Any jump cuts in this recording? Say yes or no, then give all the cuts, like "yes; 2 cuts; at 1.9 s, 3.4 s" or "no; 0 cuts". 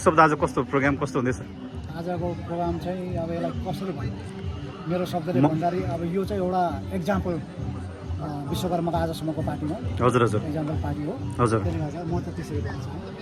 no; 0 cuts